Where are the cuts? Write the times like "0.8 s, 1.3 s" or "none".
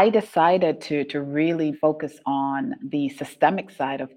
1.8 s, 2.8 s